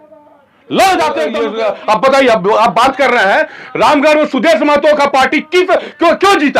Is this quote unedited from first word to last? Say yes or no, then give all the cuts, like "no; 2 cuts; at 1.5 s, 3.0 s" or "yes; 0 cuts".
no; 1 cut; at 1.4 s